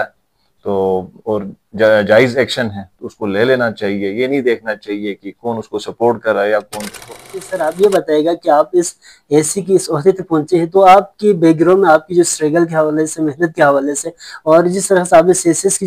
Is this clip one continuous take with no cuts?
no; 1 cut; at 7.4 s

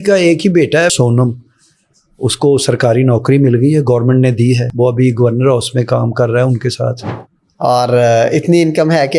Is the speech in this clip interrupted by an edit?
yes; 3 cuts; at 0.9 s, 4.7 s, 7.1 s

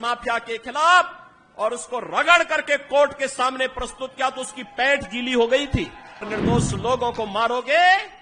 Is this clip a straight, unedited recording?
no; 1 cut; at 6.3 s

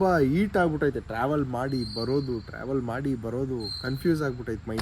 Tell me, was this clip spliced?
no; 0 cuts

